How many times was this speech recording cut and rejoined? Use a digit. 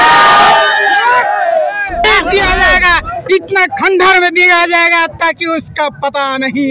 1